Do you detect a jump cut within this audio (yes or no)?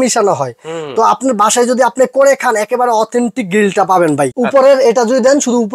yes